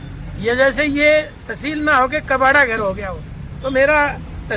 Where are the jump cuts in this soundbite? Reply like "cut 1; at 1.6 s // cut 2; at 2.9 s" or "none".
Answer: none